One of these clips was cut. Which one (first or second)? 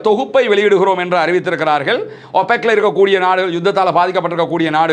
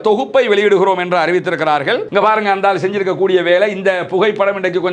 second